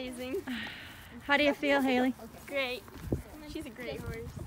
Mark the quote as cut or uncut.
uncut